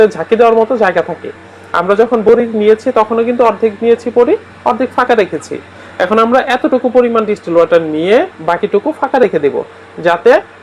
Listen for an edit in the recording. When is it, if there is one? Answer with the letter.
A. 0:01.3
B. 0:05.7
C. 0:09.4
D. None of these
D